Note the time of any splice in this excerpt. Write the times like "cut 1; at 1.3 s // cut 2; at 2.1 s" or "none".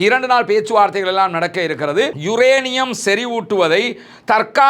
cut 1; at 2.2 s